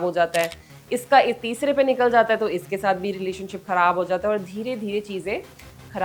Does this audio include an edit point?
no; 0 cuts

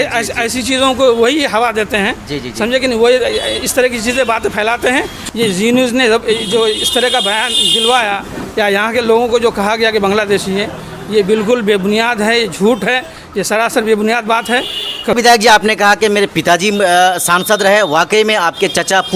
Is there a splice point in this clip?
yes; 2 cuts; at 5.1 s, 15.1 s

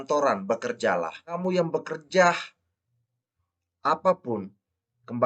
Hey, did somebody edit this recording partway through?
yes; 1 cut; at 1.3 s

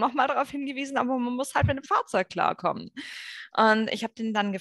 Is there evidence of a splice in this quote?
no; 0 cuts

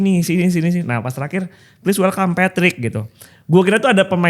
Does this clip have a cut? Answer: no; 0 cuts

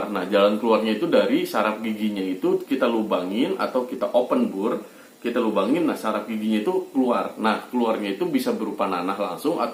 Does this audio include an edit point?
no; 0 cuts

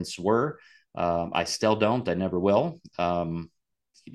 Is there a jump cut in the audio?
no; 0 cuts

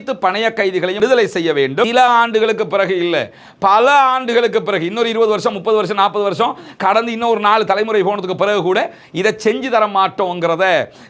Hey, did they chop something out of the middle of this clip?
yes; 2 cuts; at 1.0 s, 1.9 s

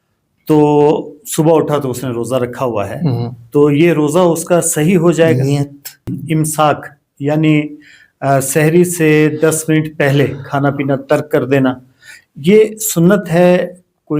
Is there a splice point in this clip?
yes; 1 cut; at 6.2 s

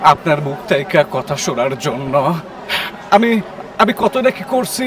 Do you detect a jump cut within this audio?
no; 0 cuts

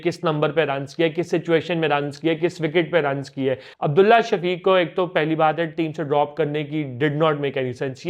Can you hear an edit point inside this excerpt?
yes; 1 cut; at 3.7 s

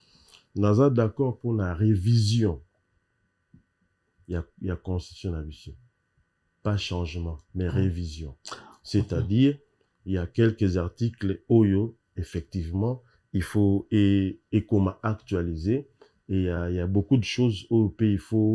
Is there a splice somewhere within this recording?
no; 0 cuts

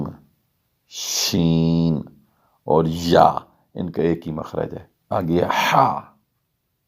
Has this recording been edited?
yes; 1 cut; at 4.9 s

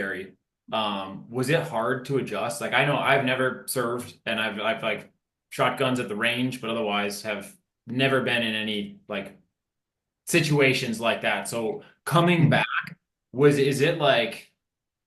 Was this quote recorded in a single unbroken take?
yes; 0 cuts

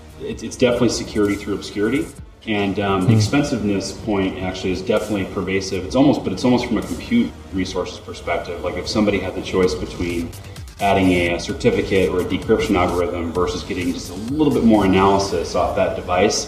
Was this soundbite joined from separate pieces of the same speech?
no; 0 cuts

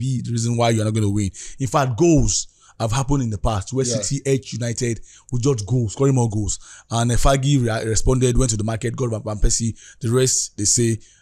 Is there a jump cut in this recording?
no; 0 cuts

